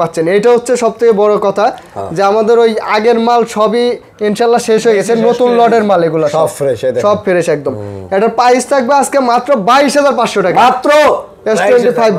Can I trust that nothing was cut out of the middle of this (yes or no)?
yes